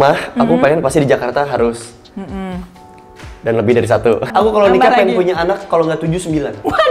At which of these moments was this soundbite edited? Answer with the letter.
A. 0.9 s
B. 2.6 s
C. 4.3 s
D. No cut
C